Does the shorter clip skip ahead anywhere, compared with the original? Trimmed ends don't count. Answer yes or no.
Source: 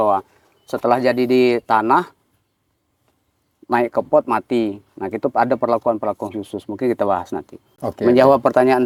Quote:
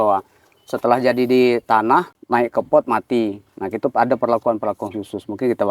yes